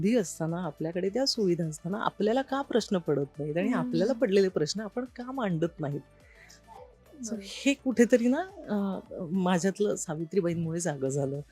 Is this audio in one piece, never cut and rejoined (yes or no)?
yes